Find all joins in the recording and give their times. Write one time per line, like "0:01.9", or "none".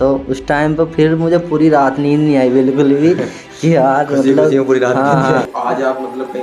0:05.5